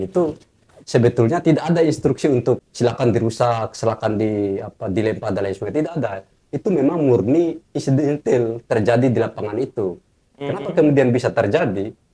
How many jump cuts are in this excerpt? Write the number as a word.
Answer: one